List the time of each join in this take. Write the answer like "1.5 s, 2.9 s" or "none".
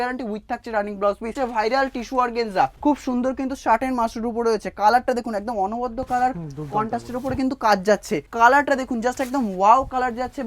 1.4 s, 2.8 s, 8.3 s